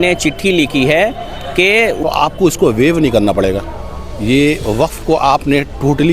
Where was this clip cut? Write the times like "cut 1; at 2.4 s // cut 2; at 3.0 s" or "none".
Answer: cut 1; at 2.0 s